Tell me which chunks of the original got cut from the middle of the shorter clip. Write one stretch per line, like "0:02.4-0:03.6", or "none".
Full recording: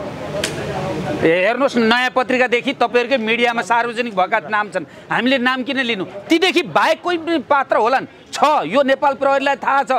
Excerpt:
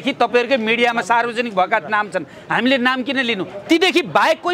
none